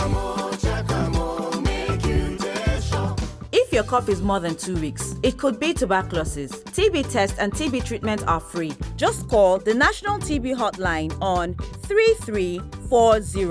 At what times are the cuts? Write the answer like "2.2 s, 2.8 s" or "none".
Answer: 3.3 s

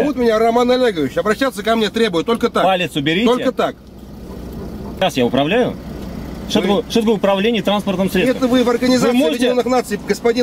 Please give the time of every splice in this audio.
4.8 s

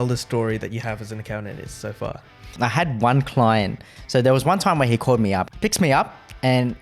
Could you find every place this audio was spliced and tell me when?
2.5 s, 3.8 s, 5.5 s

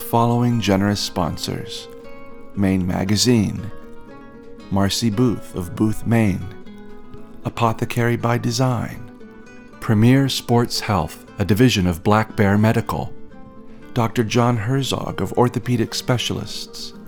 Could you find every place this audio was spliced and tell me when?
none

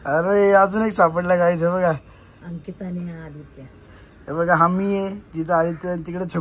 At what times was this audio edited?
none

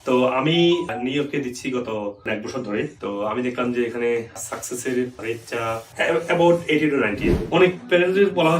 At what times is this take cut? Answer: 0.9 s, 2.5 s, 5.9 s, 7.2 s

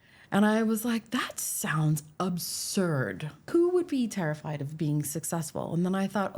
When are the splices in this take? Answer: 3.5 s

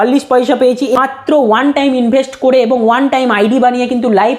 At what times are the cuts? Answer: 1.0 s

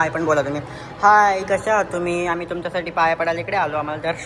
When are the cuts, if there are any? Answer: none

